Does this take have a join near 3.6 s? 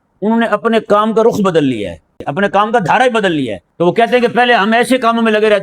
yes; 2 cuts; at 2.3 s, 3.6 s

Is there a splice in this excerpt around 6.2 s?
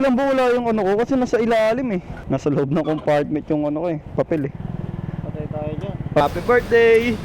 yes; 2 cuts; at 2.1 s, 6.2 s

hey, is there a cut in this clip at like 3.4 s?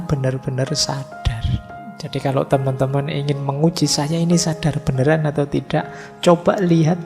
no; 1 cut; at 1.8 s

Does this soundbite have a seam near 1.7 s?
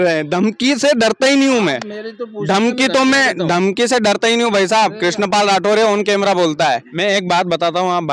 no; 1 cut; at 6.9 s

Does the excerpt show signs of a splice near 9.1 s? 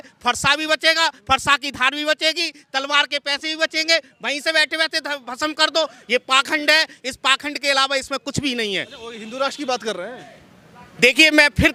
no; 0 cuts

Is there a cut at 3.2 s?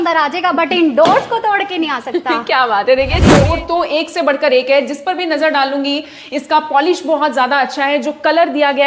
yes; 1 cut; at 3.2 s

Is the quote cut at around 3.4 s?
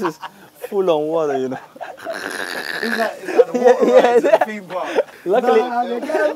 no; 1 cut; at 5.2 s

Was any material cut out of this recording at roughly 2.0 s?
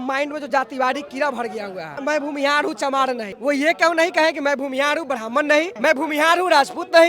yes; 3 cuts; at 2.0 s, 3.3 s, 5.7 s

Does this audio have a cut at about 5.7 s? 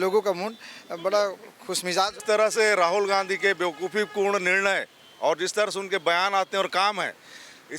no; 1 cut; at 2.2 s

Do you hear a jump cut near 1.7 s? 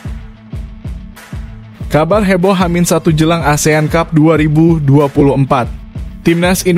yes; 1 cut; at 1.7 s

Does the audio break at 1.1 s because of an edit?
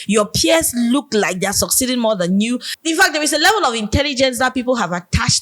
no; 1 cut; at 2.7 s

